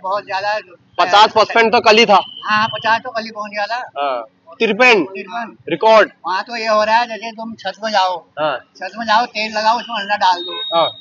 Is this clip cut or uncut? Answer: uncut